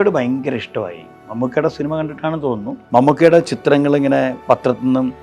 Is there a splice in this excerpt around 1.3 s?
no; 1 cut; at 2.7 s

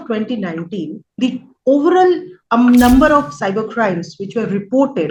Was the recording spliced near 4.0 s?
no; 2 cuts; at 1.0 s, 2.3 s

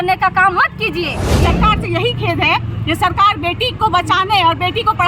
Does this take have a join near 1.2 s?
yes; 1 cut; at 1.2 s

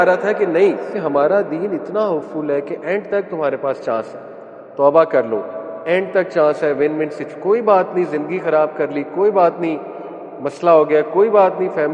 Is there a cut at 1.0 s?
yes; 1 cut; at 1.0 s

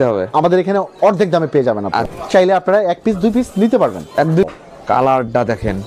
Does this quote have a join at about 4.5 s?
yes; 2 cuts; at 2.1 s, 4.5 s

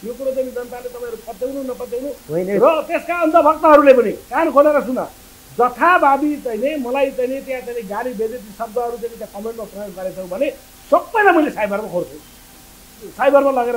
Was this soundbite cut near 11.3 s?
no; 0 cuts

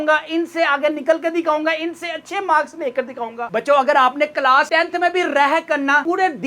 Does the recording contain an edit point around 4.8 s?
no; 1 cut; at 3.5 s

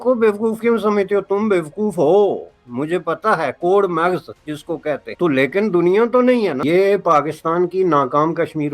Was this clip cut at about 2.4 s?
no; 2 cuts; at 5.1 s, 6.6 s

